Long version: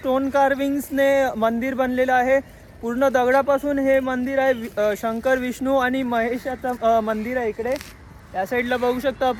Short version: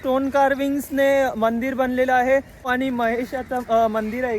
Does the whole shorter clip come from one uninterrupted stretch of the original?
no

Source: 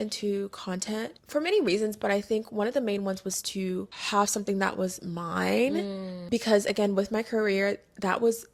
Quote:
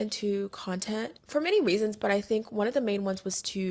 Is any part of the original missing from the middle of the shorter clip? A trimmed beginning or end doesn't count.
no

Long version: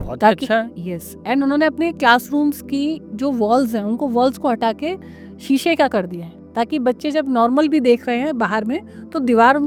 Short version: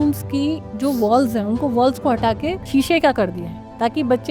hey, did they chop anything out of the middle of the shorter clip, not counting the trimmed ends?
yes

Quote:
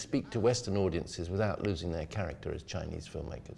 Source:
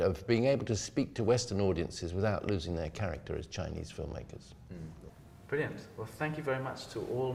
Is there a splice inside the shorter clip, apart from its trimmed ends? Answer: no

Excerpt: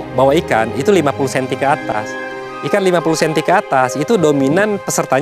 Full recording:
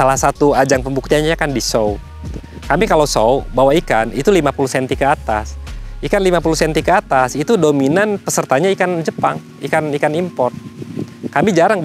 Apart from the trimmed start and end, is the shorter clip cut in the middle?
no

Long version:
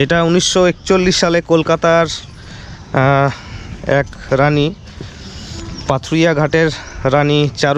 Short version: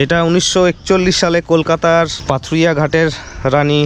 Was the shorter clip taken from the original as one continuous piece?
no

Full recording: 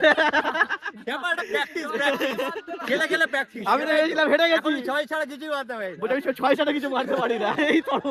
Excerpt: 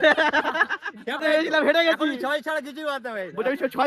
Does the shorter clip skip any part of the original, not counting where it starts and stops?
yes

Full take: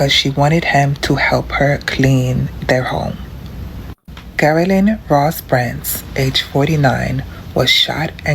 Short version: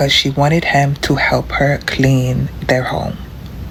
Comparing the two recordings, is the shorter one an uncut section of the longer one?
yes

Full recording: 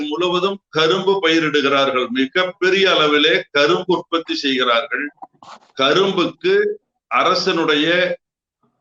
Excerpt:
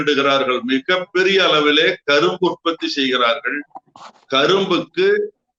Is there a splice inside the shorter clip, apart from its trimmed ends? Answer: no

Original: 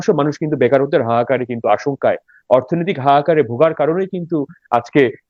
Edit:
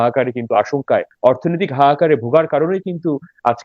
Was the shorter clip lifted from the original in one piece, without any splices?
no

